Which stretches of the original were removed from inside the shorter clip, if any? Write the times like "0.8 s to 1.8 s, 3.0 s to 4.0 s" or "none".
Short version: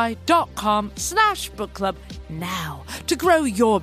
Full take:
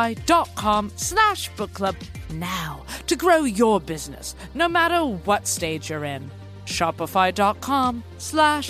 none

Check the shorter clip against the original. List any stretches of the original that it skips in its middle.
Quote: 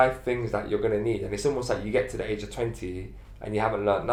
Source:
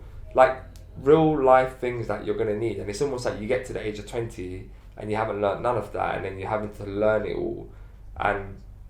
none

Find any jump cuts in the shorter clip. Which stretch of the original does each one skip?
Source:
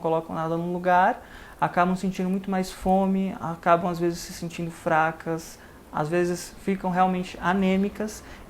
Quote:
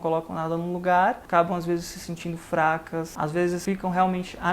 1.2 s to 3.6 s, 5.8 s to 6.5 s

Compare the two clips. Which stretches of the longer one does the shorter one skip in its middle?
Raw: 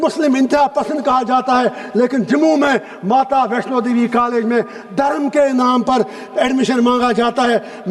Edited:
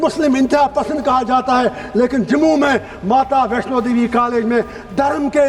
none

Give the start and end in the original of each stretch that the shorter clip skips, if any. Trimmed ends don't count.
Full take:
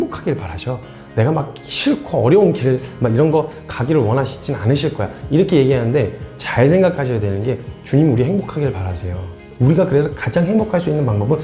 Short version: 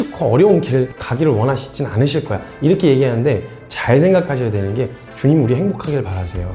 2.9 s to 3.7 s

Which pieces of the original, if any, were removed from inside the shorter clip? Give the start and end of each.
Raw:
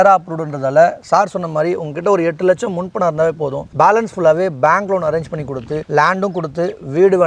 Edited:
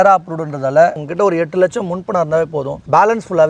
1.0 s to 1.9 s

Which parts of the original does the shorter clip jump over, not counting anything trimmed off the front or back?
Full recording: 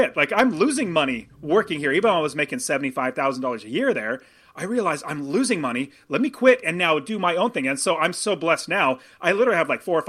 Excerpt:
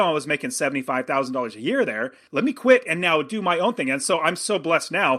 4.3 s to 6.0 s

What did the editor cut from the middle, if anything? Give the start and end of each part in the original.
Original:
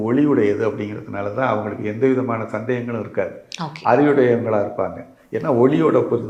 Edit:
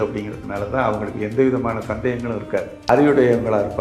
3.5 s to 3.9 s

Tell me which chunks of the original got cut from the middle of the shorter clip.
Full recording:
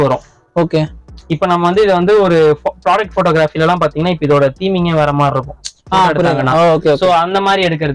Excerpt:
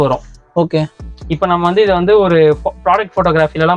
none

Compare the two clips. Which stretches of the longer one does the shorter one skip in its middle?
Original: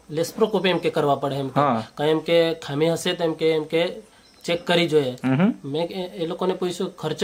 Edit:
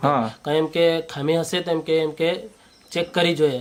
none

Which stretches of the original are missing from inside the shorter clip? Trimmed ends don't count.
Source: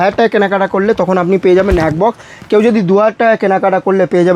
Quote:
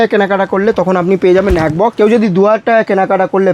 2.1 s to 2.5 s

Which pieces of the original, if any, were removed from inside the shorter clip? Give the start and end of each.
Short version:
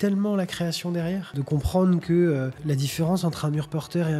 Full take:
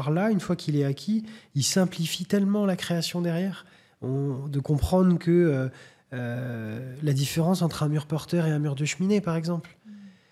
3.6 s to 4.5 s, 5.7 s to 6.9 s

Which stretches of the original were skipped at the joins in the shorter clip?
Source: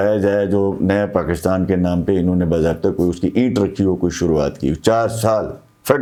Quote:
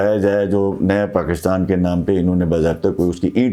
none

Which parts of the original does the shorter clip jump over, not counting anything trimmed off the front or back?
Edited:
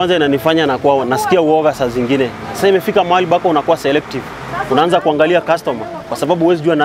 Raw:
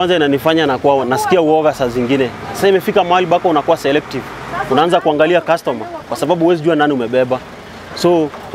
none

